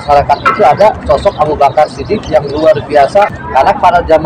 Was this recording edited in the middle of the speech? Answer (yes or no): yes